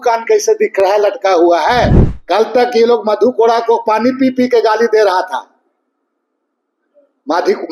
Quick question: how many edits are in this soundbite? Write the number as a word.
one